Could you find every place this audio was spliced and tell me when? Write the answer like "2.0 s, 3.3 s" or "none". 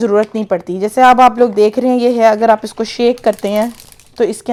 none